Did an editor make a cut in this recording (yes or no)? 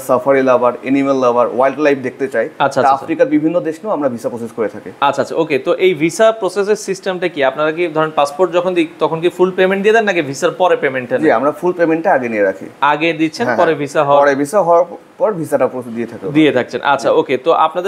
no